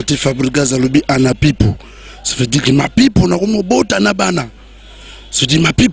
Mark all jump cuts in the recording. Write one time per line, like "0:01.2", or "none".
none